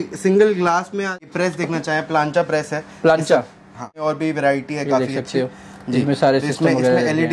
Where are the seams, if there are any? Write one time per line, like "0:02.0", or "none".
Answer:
0:01.3
0:04.0